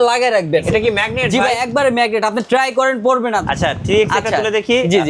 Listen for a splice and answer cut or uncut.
cut